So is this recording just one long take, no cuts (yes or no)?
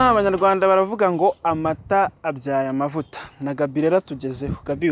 yes